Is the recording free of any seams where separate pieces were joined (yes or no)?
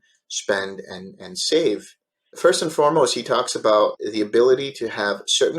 no